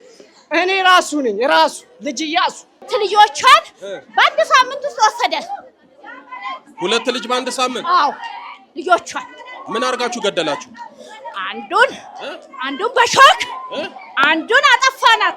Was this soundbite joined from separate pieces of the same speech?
yes; 1 cut; at 2.8 s

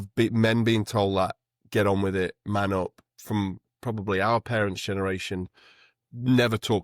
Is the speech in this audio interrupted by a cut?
yes; 1 cut; at 3.1 s

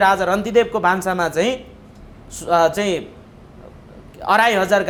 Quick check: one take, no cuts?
yes; 0 cuts

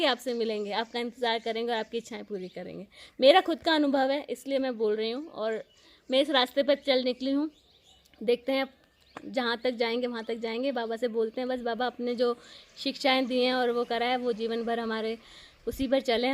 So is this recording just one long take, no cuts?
yes; 0 cuts

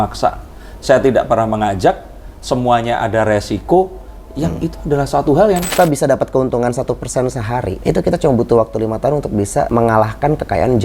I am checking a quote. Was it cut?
yes; 3 cuts; at 5.7 s, 7.7 s, 9.7 s

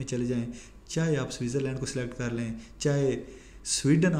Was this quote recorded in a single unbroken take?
yes; 0 cuts

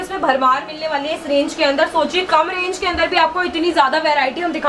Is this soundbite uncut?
yes; 0 cuts

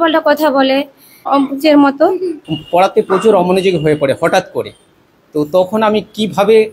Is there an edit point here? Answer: yes; 2 cuts; at 1.2 s, 2.4 s

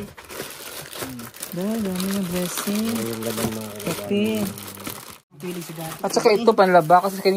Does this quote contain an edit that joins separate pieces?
yes; 1 cut; at 5.3 s

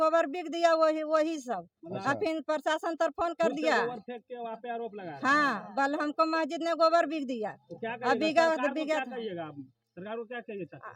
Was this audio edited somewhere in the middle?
no; 0 cuts

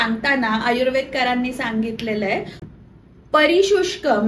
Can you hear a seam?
no; 0 cuts

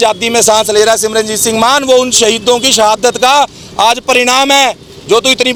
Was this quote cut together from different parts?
no; 0 cuts

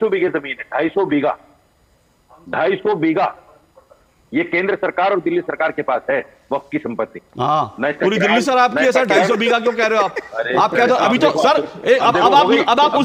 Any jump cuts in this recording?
no; 0 cuts

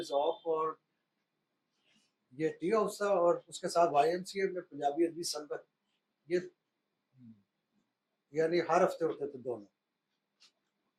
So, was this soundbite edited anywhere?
no; 0 cuts

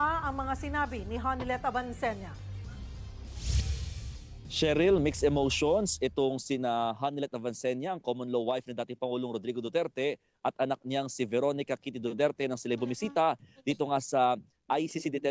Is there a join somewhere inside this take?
no; 0 cuts

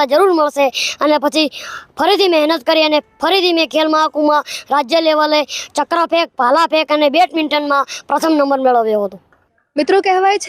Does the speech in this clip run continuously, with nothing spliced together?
yes; 0 cuts

